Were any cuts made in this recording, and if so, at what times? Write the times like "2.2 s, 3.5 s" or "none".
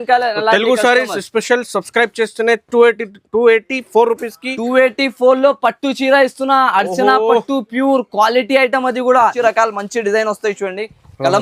9.3 s